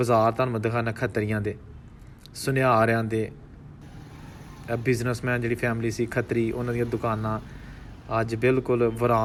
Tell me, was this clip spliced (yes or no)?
no